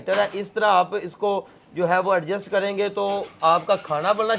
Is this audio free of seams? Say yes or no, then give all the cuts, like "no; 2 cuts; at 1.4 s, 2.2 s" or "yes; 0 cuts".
yes; 0 cuts